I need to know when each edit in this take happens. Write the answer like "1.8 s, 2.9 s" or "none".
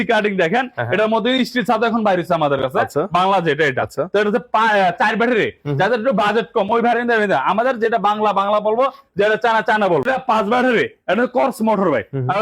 10.1 s